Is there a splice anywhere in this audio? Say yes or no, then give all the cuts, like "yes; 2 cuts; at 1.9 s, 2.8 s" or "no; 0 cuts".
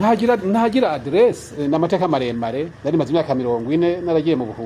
yes; 2 cuts; at 1.6 s, 2.7 s